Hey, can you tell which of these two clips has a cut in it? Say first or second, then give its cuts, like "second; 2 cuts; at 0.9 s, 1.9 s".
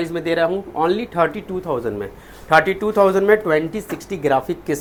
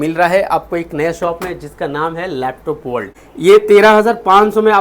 second; 1 cut; at 3.2 s